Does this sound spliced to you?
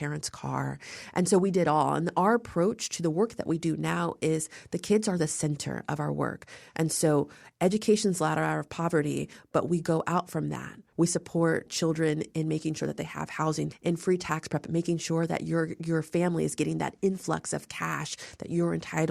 yes; 2 cuts; at 10.8 s, 13.7 s

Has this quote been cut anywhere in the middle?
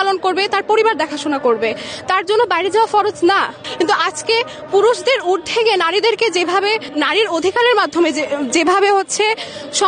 yes; 2 cuts; at 3.6 s, 6.9 s

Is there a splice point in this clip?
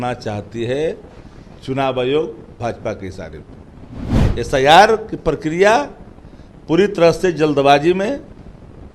yes; 1 cut; at 4.1 s

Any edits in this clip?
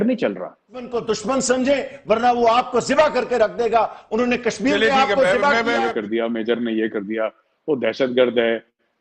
yes; 2 cuts; at 0.9 s, 5.9 s

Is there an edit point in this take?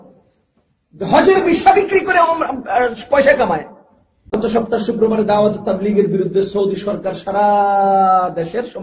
yes; 1 cut; at 4.4 s

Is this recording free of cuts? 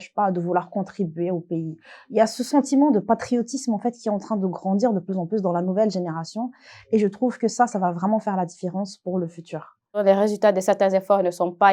no; 1 cut; at 10.0 s

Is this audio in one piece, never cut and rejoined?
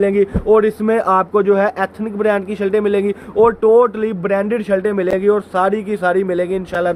yes; 0 cuts

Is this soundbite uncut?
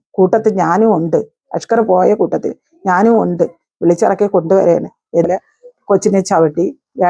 no; 1 cut; at 5.2 s

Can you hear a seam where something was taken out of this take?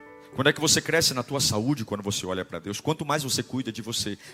no; 0 cuts

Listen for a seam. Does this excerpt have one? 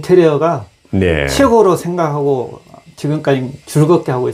no; 0 cuts

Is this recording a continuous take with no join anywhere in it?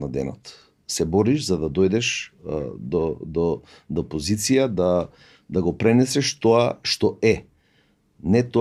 yes; 0 cuts

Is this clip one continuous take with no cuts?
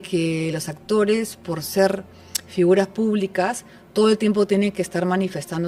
yes; 0 cuts

